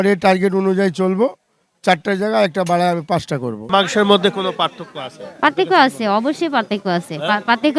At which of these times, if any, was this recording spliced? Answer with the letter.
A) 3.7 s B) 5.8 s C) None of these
A